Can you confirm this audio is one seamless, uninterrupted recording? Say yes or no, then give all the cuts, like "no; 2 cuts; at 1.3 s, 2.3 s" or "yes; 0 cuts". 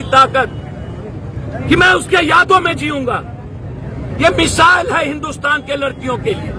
yes; 0 cuts